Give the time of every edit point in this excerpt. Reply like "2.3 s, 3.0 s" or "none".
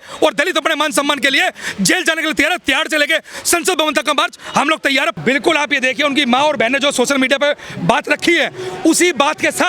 5.1 s